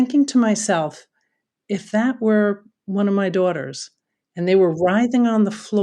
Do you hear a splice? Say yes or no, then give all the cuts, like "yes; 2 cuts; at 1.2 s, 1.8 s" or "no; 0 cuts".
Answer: no; 0 cuts